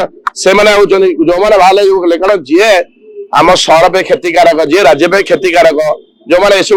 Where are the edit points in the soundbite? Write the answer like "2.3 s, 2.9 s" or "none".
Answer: none